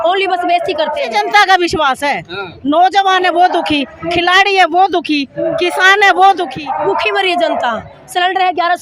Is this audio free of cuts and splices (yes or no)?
no